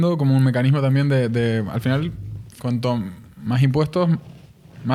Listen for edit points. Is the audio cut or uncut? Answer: uncut